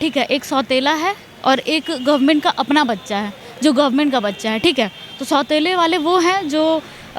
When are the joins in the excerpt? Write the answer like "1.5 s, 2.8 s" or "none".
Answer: none